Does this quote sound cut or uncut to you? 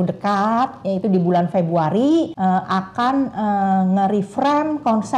cut